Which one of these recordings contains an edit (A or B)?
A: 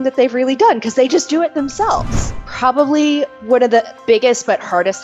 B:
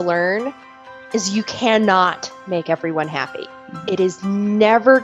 A